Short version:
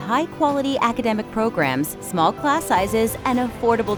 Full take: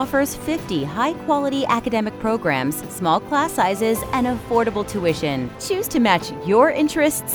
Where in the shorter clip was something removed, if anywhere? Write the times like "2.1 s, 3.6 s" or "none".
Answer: none